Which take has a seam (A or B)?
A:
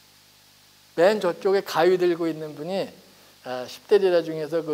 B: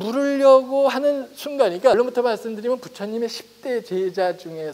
B